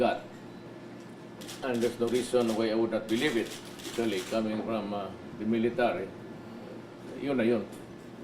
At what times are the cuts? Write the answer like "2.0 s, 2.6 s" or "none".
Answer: 2.4 s